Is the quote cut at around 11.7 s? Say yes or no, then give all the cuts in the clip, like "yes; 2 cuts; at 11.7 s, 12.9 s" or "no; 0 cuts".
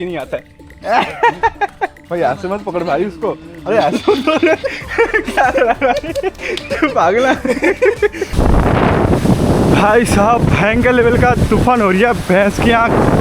no; 2 cuts; at 2.0 s, 8.2 s